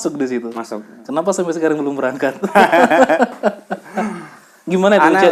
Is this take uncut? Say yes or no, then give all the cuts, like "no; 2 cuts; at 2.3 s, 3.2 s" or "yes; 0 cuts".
yes; 0 cuts